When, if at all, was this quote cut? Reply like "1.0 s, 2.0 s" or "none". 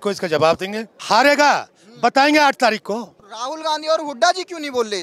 0.9 s, 3.1 s

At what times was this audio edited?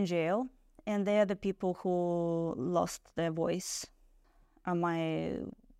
4.2 s

